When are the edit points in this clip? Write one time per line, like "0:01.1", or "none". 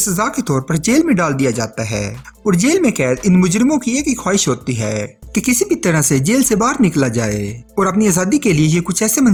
none

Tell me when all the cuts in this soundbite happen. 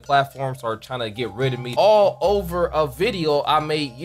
0:01.7

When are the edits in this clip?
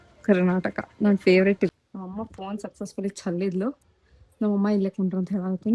0:01.7

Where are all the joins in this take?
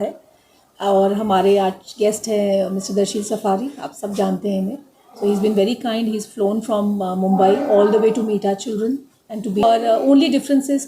0:09.6

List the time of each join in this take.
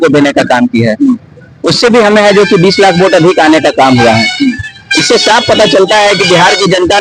none

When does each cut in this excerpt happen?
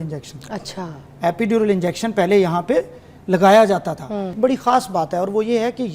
0:04.4

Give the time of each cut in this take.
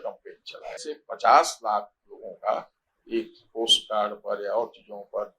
0:00.9

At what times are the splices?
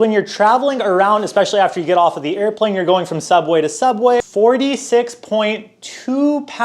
0:04.2

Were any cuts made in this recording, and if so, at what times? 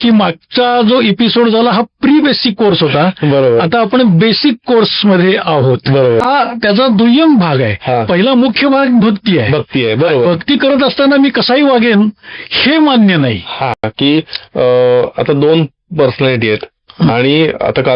0:06.2
0:13.8

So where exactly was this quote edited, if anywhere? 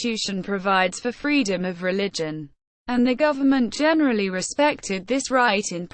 none

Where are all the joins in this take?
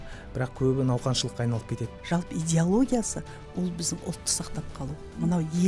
0:01.8

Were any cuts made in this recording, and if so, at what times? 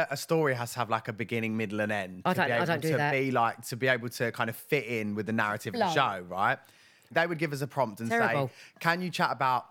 0:07.1

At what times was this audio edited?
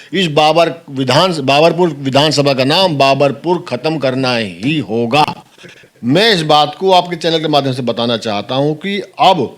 0:05.2

